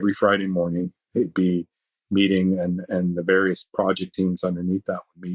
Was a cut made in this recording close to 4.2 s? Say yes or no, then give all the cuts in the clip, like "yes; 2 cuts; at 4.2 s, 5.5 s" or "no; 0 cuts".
no; 0 cuts